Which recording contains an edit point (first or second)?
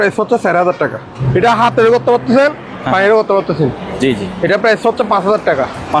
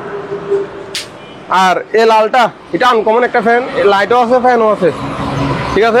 first